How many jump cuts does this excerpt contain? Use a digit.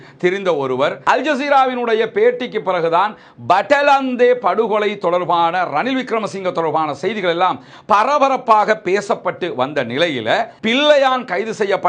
2